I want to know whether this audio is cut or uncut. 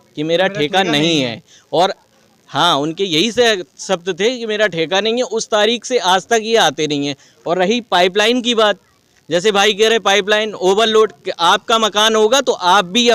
uncut